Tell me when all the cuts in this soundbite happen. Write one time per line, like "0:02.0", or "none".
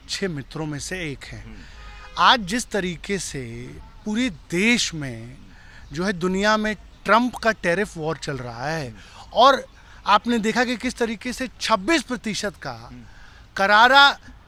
none